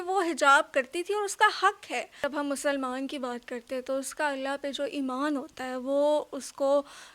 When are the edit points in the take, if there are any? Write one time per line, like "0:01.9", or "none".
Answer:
0:02.1

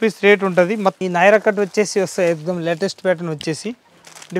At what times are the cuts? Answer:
0:01.0

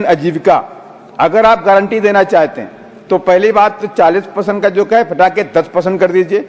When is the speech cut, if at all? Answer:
none

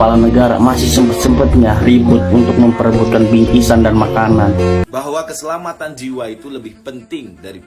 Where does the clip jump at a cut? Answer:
0:04.8

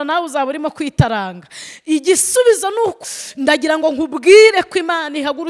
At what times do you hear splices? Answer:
0:03.0

